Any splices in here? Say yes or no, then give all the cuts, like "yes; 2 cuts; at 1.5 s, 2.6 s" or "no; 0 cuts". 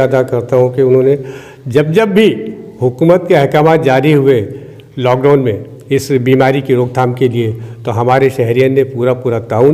no; 0 cuts